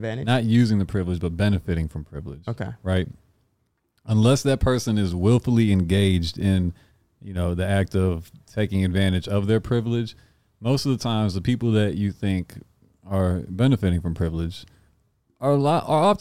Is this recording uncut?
yes; 0 cuts

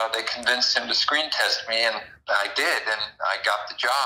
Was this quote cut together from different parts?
yes; 1 cut; at 2.1 s

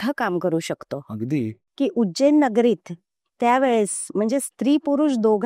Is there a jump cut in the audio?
yes; 1 cut; at 1.6 s

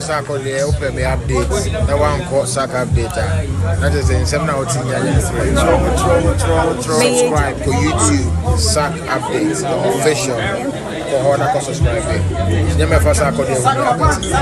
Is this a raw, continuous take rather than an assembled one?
yes; 0 cuts

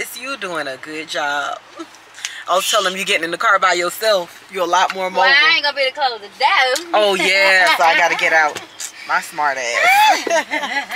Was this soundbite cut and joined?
no; 0 cuts

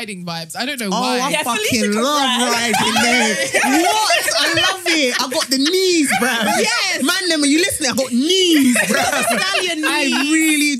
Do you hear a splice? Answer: no; 0 cuts

